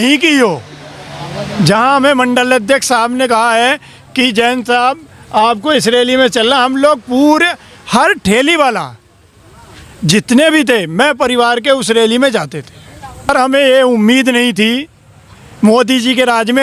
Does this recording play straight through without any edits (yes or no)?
no